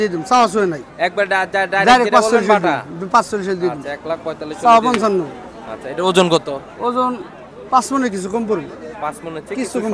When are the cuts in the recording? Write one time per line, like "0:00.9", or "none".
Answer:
none

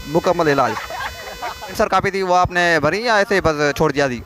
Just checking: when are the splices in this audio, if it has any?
0:01.7

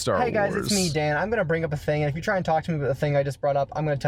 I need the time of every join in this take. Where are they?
none

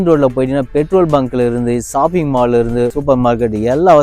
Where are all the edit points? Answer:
none

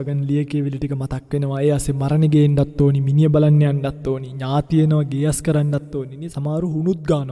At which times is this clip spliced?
none

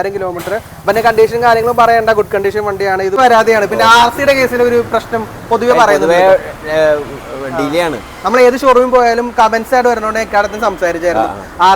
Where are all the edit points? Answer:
0:03.2

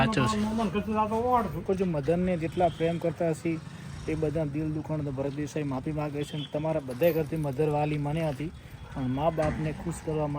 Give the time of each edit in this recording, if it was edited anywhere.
0:01.6

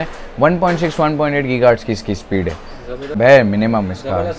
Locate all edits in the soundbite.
0:03.2

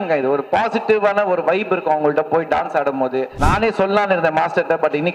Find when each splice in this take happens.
0:03.3

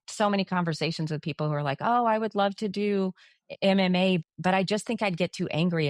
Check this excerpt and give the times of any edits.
0:04.2

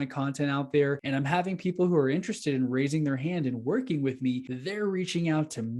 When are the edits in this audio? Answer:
0:01.0
0:04.5

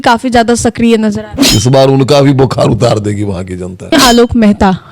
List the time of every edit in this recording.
0:01.3
0:03.9

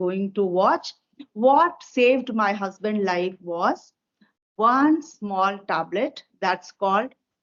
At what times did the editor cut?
none

